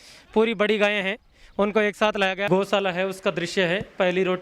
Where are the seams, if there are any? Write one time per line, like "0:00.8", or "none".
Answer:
0:02.4